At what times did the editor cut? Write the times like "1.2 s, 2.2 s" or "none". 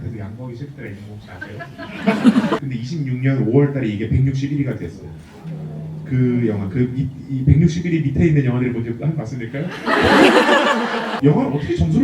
2.6 s, 11.1 s